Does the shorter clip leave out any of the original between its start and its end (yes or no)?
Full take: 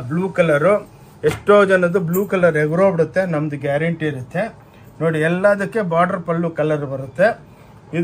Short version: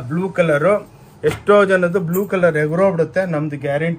no